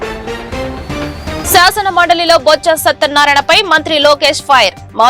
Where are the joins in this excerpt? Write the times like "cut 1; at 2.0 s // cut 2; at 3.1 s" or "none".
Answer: cut 1; at 1.4 s